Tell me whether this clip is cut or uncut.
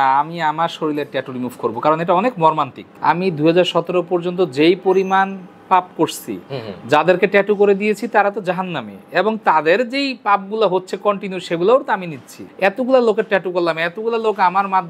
cut